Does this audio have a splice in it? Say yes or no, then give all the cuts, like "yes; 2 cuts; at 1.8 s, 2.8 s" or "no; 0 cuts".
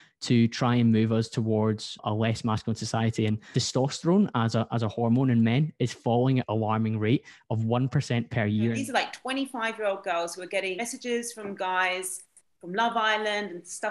yes; 5 cuts; at 2.0 s, 3.4 s, 6.4 s, 8.8 s, 10.8 s